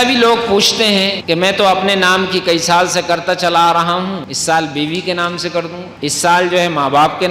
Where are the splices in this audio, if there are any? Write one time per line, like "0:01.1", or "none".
0:01.2
0:04.3
0:05.9